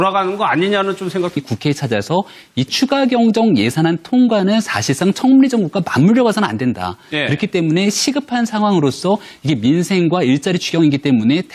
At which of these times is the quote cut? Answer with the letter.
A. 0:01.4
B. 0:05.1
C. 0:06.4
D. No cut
D